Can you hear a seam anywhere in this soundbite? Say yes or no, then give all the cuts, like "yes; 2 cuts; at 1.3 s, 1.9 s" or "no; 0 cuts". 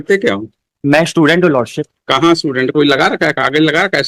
no; 0 cuts